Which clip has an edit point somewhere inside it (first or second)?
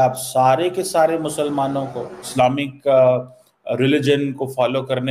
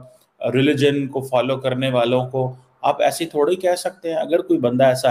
first